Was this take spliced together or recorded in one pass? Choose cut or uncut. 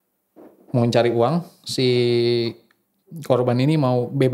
uncut